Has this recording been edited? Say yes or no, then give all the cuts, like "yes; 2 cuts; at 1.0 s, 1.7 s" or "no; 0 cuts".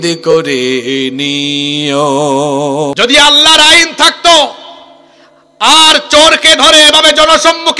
yes; 1 cut; at 2.9 s